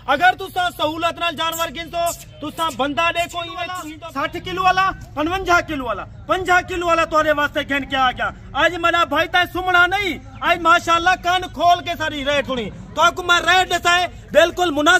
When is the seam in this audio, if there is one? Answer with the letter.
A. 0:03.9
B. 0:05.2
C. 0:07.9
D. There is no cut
A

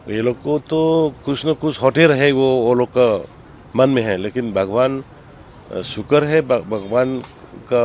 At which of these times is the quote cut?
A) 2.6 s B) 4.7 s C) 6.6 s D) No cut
D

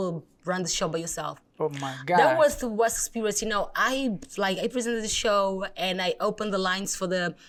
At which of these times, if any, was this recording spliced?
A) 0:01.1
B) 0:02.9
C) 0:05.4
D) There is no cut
D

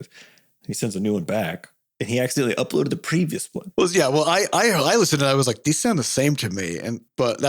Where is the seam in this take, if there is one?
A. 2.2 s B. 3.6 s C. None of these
B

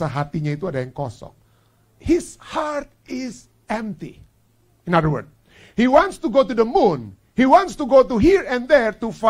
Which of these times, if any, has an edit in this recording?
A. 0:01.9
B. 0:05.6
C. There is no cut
A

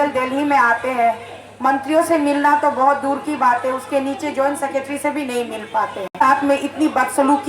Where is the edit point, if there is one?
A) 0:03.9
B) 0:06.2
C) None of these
B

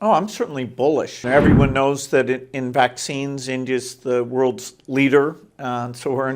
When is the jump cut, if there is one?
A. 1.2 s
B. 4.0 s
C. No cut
A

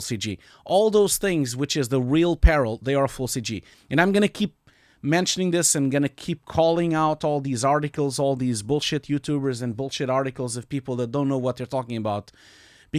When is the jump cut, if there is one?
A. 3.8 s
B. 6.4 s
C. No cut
A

